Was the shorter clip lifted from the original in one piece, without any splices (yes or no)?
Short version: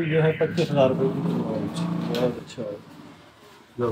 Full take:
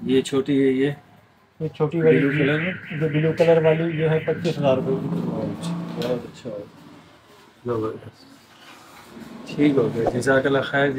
yes